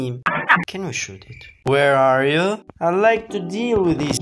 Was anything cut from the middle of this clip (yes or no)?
yes